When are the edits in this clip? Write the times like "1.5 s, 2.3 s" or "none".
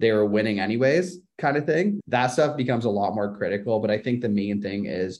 2.0 s